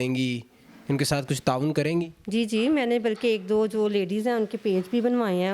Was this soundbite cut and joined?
no; 0 cuts

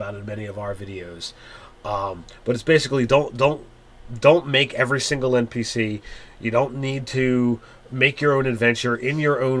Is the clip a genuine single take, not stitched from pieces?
no; 1 cut; at 1.5 s

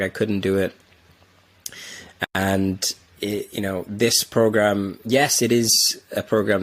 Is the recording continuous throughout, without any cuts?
yes; 0 cuts

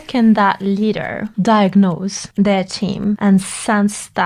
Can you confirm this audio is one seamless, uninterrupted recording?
no; 3 cuts; at 1.2 s, 2.2 s, 3.2 s

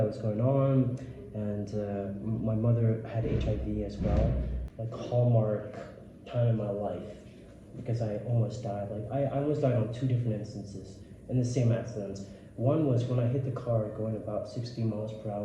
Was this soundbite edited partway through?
yes; 1 cut; at 4.6 s

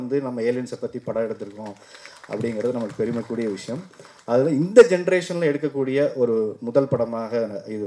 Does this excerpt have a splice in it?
no; 0 cuts

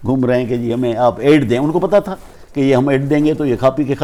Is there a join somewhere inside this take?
no; 0 cuts

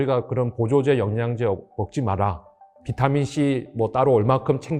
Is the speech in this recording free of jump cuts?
yes; 0 cuts

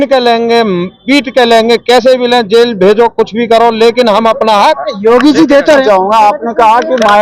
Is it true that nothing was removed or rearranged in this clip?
no; 1 cut; at 5.8 s

